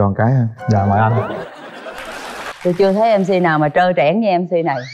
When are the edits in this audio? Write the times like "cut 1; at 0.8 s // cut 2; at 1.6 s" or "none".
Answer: cut 1; at 2.5 s